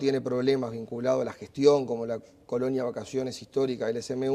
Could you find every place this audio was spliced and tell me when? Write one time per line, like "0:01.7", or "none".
0:02.8